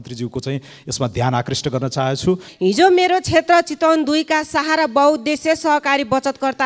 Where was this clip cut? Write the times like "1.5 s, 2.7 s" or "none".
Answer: 2.5 s